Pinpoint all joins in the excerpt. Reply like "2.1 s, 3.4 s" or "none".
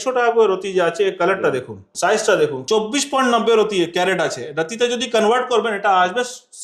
1.8 s, 2.6 s